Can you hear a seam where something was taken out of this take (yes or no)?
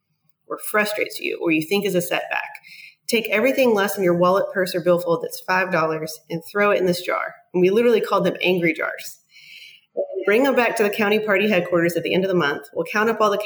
no